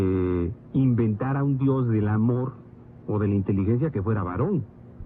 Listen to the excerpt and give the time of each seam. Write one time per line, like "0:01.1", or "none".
none

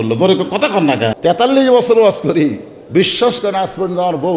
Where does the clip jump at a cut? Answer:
0:01.2

